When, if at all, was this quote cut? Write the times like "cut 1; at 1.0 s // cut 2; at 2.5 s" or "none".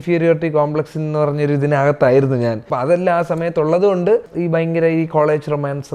cut 1; at 2.6 s // cut 2; at 4.3 s

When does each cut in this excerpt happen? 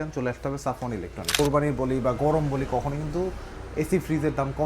cut 1; at 1.3 s

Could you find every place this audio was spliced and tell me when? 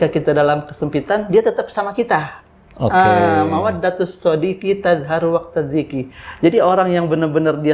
none

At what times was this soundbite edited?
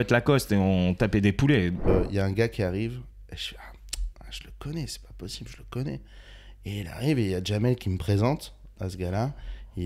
cut 1; at 1.9 s

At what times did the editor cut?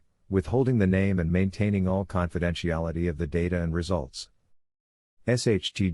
cut 1; at 3.4 s

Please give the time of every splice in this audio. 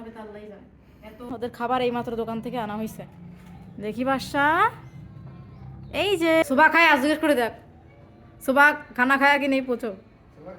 cut 1; at 1.3 s // cut 2; at 6.4 s

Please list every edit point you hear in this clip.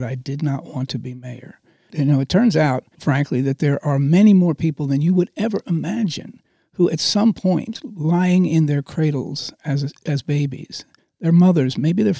cut 1; at 1.9 s // cut 2; at 2.9 s

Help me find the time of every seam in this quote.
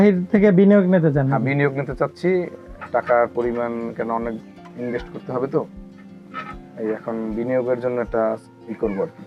none

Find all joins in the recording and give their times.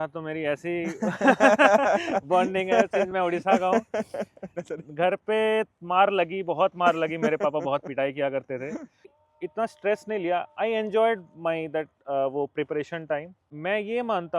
cut 1; at 4.4 s // cut 2; at 9.1 s // cut 3; at 13.5 s

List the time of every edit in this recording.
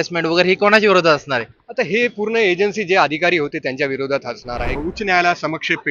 cut 1; at 4.8 s

